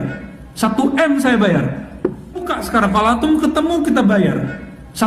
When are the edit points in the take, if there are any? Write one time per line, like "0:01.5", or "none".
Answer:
0:02.5